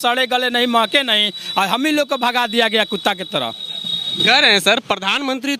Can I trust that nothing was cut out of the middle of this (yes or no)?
yes